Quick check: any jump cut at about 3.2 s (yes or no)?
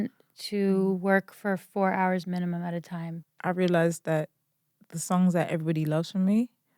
yes